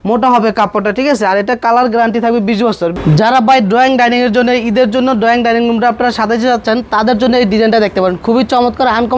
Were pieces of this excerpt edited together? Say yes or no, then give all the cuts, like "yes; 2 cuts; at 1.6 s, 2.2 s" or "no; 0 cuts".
yes; 1 cut; at 2.9 s